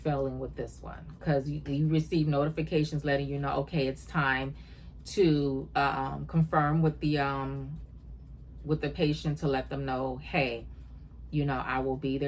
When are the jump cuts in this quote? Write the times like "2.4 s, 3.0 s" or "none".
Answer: none